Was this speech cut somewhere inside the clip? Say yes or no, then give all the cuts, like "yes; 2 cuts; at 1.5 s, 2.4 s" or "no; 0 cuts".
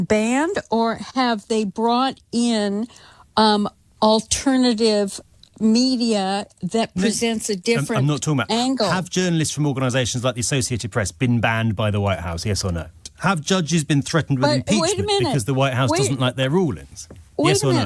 yes; 1 cut; at 13.1 s